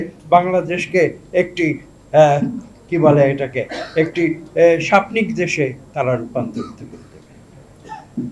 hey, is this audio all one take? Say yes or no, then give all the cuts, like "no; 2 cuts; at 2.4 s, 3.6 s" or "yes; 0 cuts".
yes; 0 cuts